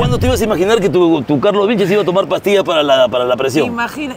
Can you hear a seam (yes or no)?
no